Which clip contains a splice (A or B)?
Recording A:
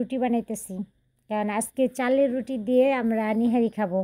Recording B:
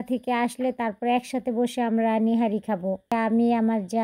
B